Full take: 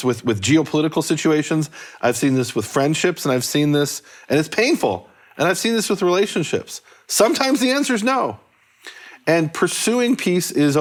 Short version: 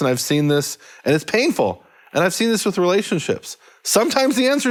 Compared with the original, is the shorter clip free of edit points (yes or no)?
yes